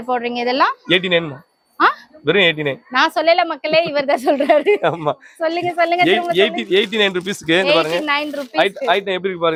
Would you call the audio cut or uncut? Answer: uncut